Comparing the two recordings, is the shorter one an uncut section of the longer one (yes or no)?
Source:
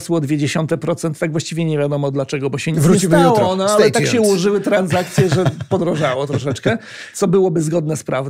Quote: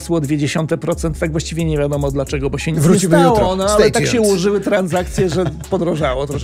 yes